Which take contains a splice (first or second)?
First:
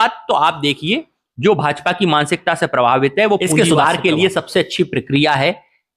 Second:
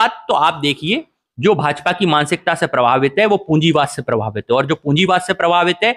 first